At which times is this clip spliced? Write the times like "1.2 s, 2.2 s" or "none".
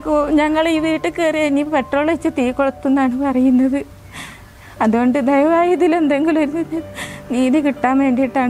none